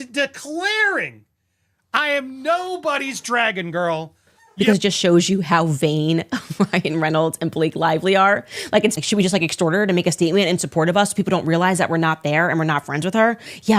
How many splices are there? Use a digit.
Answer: 2